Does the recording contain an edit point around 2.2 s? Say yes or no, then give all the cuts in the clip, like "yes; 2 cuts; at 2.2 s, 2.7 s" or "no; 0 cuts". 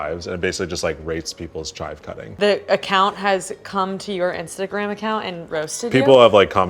yes; 1 cut; at 2.2 s